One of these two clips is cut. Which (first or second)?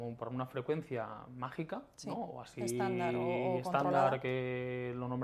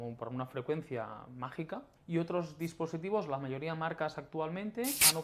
second